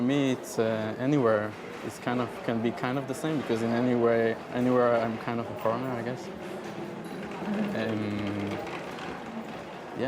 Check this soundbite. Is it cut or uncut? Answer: cut